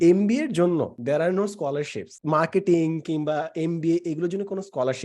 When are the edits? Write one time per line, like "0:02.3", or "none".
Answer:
0:01.0
0:02.1